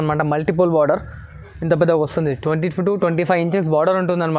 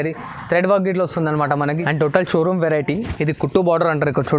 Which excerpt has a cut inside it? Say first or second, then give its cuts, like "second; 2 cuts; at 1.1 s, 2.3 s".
second; 1 cut; at 1.6 s